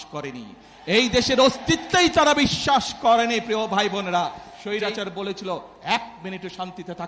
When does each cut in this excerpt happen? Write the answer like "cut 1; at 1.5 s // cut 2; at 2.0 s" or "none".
cut 1; at 4.5 s